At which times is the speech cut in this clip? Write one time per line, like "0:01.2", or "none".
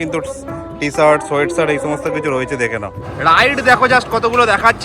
0:03.0